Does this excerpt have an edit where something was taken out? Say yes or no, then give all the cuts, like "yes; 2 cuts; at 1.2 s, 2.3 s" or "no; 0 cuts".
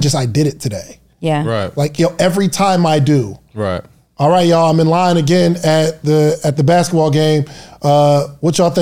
no; 0 cuts